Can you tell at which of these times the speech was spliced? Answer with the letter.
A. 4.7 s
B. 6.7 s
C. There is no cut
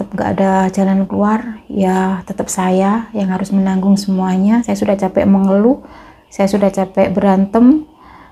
A